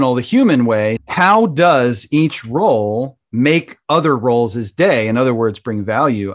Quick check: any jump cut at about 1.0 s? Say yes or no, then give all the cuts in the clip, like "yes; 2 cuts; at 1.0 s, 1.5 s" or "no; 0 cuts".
yes; 1 cut; at 1.0 s